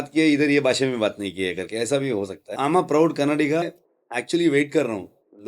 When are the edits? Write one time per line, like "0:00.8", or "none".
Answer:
0:02.4
0:03.6